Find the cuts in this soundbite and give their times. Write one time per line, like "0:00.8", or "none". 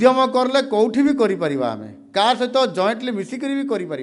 none